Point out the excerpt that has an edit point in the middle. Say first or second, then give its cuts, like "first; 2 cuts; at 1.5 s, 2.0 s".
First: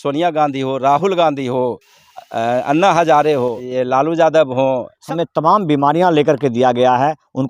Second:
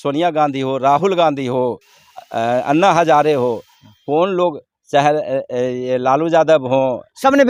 first; 2 cuts; at 3.7 s, 4.9 s